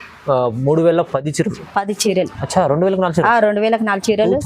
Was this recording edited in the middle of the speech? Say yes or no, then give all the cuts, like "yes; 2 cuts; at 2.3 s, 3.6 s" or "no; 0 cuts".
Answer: yes; 1 cut; at 2.0 s